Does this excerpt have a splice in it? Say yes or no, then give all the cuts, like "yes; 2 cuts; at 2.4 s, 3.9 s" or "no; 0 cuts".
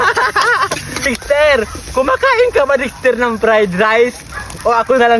yes; 1 cut; at 1.0 s